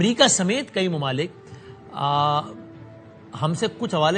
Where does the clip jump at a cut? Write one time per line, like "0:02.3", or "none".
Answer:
none